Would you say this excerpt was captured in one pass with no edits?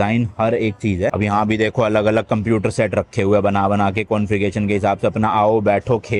no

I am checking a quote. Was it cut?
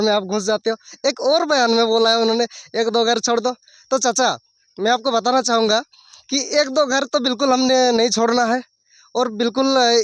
no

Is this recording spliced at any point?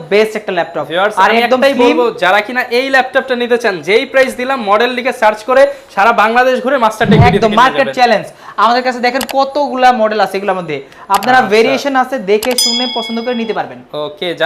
no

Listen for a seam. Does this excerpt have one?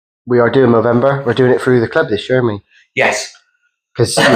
no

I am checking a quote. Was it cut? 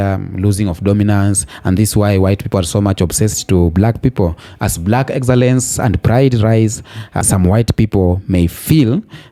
no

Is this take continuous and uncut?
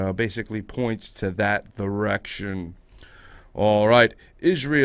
yes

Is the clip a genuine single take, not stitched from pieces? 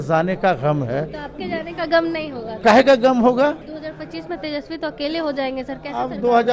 no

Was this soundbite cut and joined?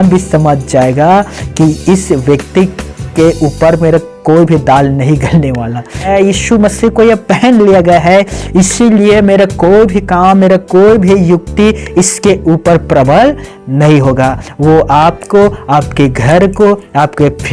yes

